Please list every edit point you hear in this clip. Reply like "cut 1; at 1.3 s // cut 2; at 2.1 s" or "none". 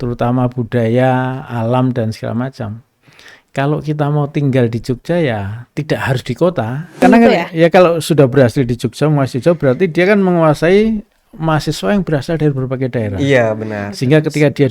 cut 1; at 7.0 s